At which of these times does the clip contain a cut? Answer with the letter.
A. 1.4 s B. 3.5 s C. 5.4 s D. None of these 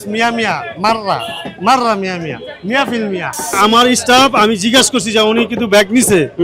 B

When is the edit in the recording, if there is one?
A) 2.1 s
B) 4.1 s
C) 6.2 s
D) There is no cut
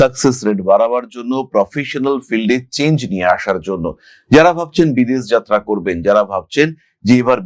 D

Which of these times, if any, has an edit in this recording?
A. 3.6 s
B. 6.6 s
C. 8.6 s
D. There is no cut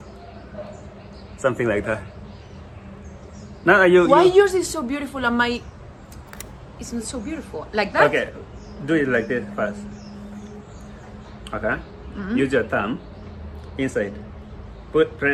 D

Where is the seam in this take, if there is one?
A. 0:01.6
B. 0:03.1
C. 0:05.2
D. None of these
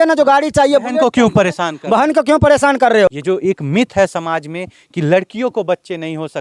B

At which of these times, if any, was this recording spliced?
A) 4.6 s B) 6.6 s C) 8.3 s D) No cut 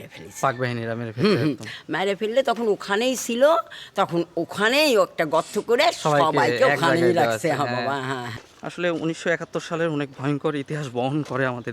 C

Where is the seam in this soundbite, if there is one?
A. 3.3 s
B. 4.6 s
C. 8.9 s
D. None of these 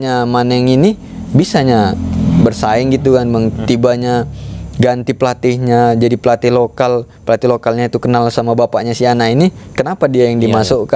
D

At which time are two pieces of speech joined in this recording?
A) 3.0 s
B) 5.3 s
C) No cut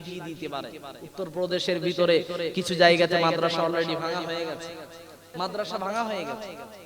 B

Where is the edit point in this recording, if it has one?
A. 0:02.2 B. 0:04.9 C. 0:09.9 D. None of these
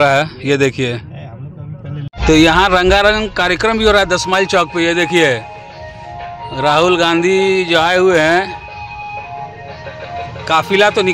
A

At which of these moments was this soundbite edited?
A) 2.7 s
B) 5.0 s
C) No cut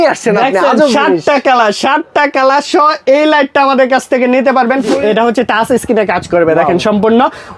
B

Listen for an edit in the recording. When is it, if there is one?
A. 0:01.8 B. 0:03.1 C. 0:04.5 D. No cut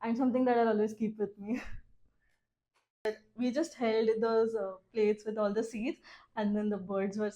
B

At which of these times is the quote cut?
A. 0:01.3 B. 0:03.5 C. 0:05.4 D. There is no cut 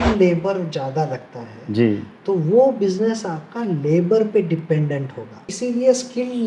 C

